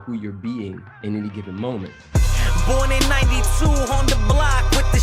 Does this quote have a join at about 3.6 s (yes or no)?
no